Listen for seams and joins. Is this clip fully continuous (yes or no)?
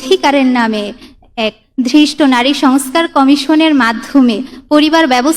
yes